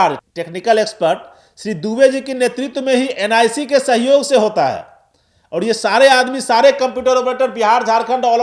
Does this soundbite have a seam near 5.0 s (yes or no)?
no